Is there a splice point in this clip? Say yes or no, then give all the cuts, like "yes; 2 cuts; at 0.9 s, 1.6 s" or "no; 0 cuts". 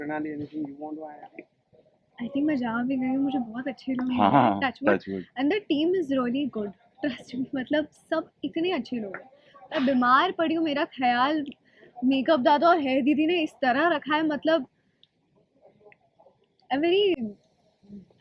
no; 0 cuts